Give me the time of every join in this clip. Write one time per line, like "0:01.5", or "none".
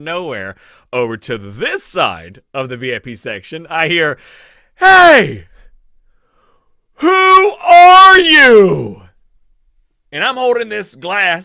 none